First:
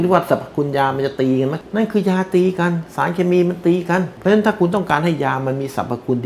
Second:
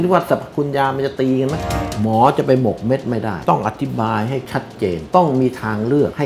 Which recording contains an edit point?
second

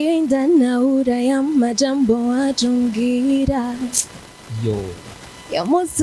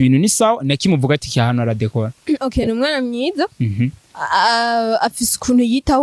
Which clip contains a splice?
second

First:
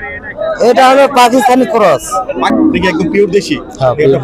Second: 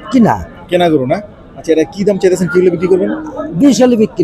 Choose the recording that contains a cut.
first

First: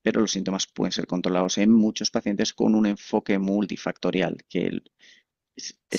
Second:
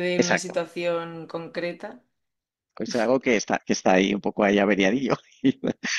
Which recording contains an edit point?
second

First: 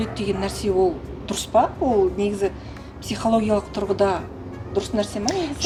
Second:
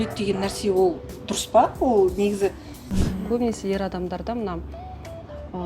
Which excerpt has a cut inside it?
second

